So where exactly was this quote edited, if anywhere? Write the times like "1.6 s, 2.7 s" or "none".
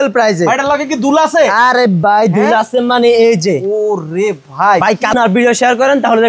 5.3 s